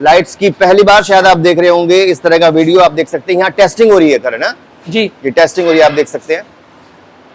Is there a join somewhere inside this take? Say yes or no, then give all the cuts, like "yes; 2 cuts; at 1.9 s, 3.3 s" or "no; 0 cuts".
no; 0 cuts